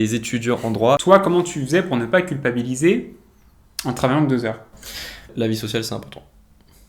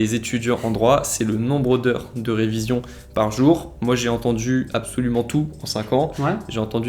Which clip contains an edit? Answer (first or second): first